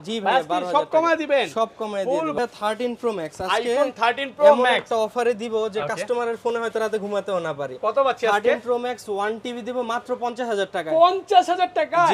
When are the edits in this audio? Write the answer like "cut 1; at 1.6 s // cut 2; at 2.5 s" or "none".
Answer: cut 1; at 2.4 s

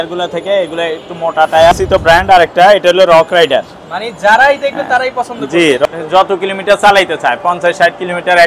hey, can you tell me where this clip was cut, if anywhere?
cut 1; at 1.7 s // cut 2; at 5.8 s

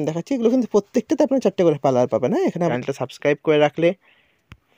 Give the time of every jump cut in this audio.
cut 1; at 2.8 s

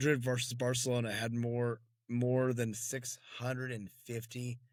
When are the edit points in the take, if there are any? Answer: none

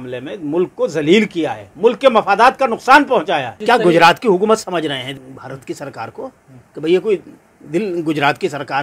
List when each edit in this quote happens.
cut 1; at 3.6 s // cut 2; at 5.2 s

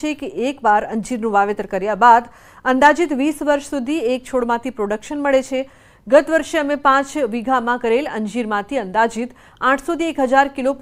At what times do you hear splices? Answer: none

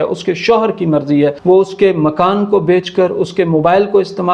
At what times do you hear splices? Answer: cut 1; at 1.4 s

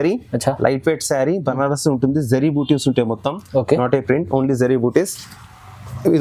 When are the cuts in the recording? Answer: none

